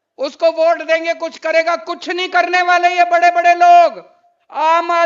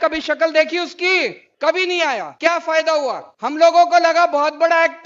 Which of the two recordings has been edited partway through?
second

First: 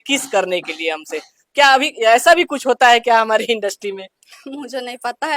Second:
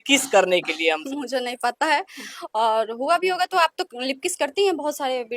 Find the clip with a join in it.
second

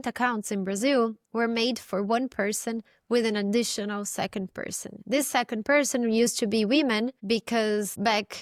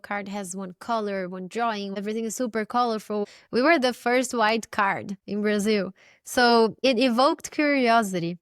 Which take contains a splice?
second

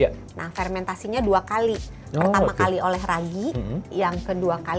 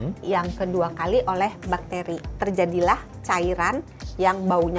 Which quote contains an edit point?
second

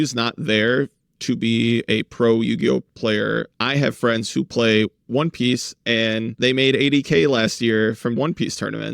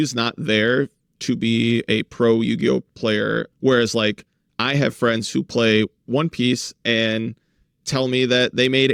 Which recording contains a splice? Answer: first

